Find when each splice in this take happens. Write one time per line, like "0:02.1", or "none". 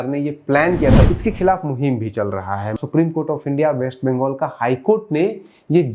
0:01.1
0:02.8